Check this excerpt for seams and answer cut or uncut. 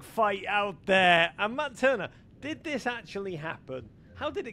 uncut